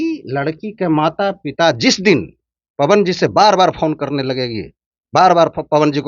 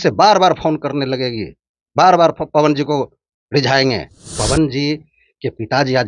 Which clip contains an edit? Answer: second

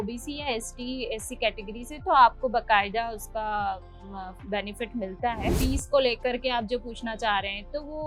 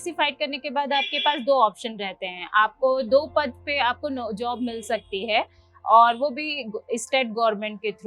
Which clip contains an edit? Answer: first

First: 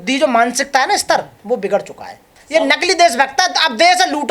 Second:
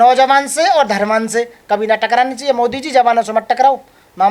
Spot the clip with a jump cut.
first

